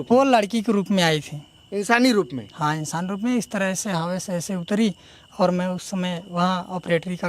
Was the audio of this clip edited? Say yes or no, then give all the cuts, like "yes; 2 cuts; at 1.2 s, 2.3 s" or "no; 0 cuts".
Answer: no; 0 cuts